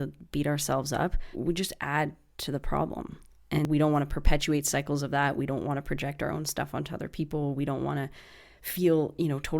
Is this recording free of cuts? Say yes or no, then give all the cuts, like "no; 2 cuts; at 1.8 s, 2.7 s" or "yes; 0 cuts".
no; 2 cuts; at 1.2 s, 3.7 s